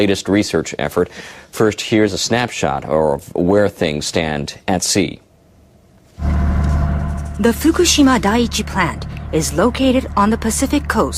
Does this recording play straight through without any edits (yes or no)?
no